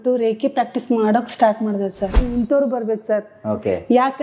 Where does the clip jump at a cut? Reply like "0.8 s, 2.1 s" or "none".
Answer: 2.2 s

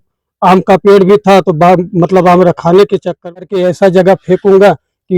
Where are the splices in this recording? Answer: 3.3 s

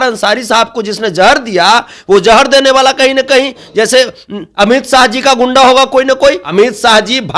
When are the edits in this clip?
6.4 s

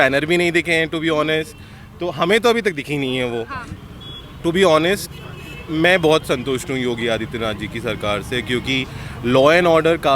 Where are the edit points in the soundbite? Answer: 3.7 s

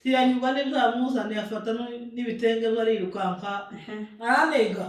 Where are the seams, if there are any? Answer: none

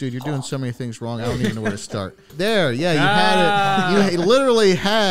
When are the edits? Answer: 2.3 s

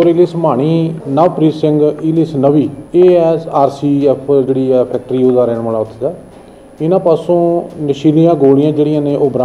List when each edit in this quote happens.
1.0 s, 2.8 s

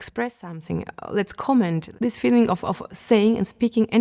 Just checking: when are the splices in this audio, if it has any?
1.9 s

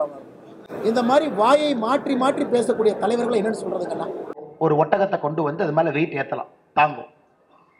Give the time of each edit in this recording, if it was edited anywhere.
4.4 s

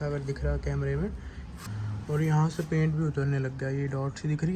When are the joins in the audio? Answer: 1.5 s

